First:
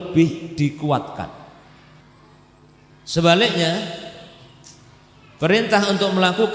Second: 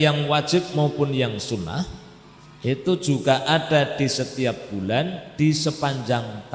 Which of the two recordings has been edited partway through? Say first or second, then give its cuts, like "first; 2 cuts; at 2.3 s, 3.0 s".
first; 1 cut; at 2.0 s